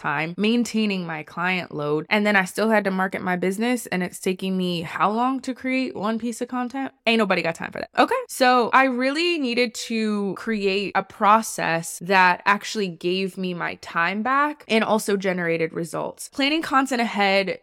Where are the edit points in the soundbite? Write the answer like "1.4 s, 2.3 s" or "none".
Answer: 16.3 s